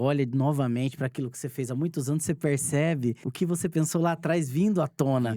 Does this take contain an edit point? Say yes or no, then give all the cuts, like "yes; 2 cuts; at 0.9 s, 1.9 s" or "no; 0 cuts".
yes; 1 cut; at 3.2 s